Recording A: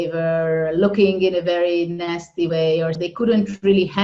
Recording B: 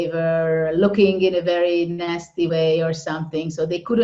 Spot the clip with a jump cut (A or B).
A